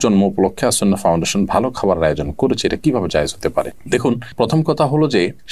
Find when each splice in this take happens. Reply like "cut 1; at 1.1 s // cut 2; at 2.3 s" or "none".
none